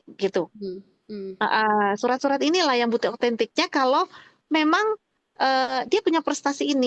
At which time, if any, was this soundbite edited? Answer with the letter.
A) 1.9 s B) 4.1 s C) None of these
C